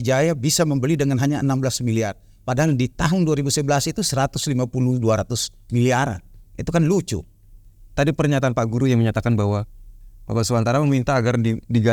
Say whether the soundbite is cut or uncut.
uncut